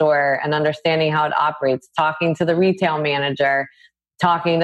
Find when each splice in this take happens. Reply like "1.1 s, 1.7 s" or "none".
none